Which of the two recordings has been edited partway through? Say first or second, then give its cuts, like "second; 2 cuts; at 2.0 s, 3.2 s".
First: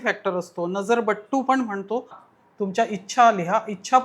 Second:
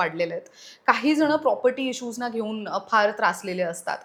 first; 1 cut; at 2.2 s